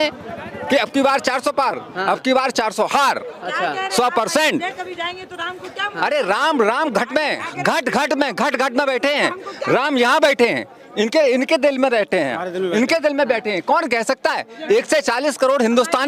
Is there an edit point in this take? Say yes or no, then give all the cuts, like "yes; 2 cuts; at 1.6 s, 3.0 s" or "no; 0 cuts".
no; 0 cuts